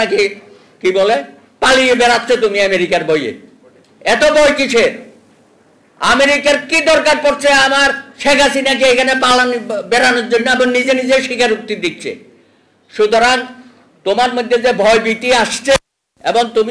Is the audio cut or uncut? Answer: uncut